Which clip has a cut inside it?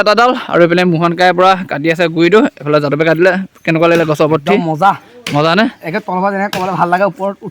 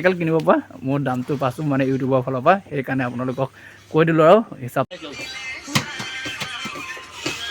second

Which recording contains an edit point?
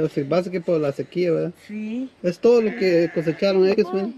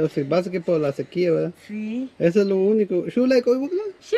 first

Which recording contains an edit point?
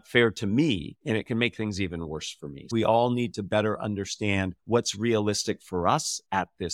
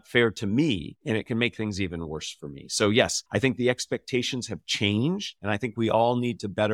first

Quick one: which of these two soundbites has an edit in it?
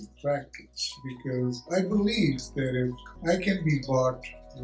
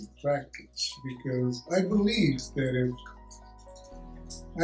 first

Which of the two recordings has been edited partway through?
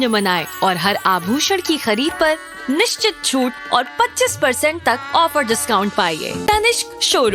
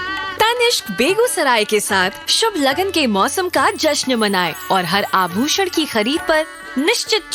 first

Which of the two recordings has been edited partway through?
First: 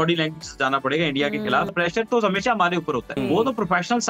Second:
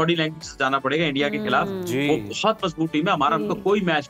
first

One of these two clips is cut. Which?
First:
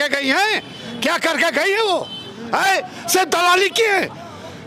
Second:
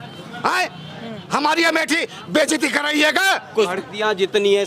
second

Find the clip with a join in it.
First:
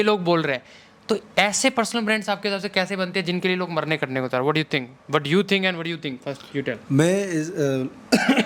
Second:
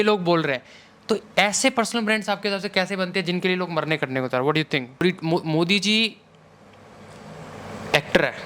second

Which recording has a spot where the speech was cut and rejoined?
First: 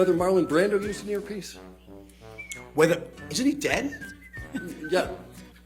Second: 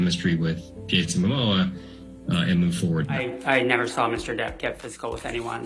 second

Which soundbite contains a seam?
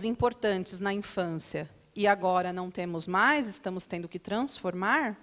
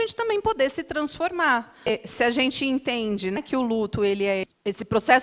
second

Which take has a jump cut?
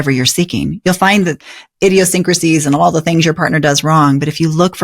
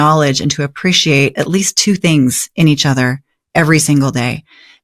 first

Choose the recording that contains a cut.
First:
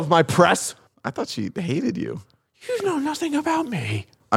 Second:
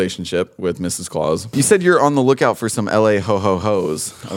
second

